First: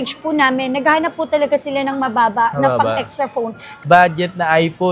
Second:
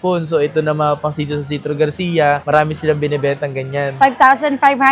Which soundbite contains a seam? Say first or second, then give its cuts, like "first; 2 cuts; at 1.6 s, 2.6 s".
first; 1 cut; at 3.8 s